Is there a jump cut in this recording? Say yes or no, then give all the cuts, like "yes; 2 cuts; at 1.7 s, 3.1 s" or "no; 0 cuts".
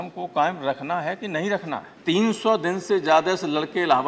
yes; 1 cut; at 1.9 s